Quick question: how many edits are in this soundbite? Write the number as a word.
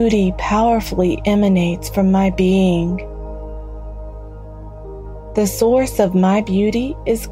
two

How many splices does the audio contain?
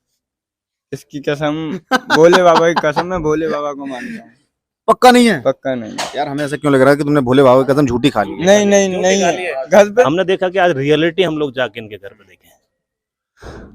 one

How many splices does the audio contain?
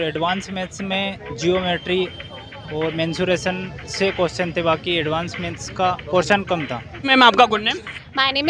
one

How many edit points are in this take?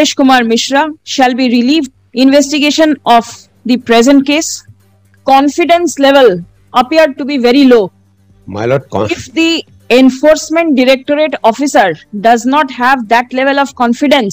three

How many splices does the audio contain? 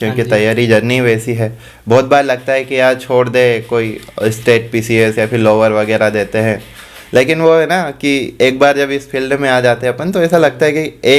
zero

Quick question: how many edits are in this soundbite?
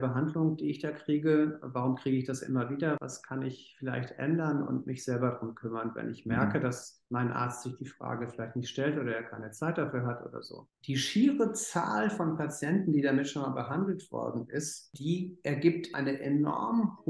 three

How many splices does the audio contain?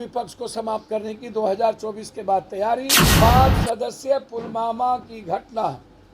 one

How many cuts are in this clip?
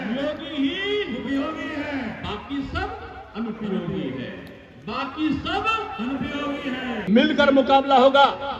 one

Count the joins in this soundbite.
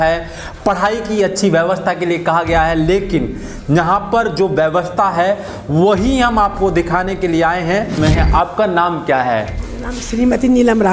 one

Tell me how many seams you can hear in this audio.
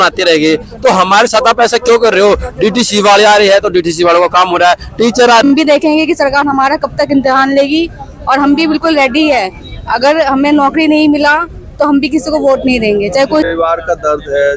two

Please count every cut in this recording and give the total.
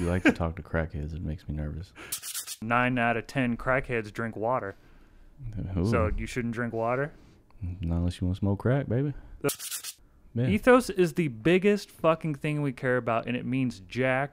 two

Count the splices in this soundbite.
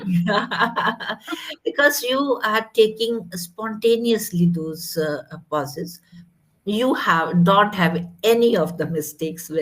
one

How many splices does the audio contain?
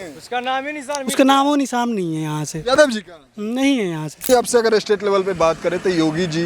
one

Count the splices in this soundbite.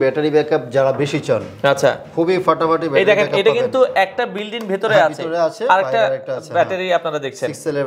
zero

